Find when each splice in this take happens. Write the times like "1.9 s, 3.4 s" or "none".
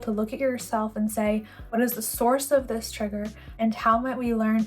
1.6 s, 3.4 s